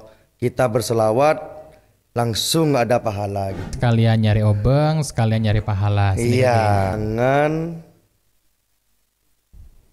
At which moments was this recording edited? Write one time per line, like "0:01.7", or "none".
0:03.7
0:06.9